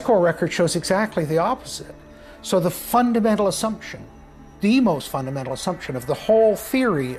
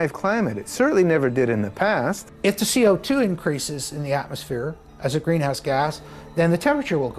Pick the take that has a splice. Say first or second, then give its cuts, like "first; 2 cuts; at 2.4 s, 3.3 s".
second; 1 cut; at 2.3 s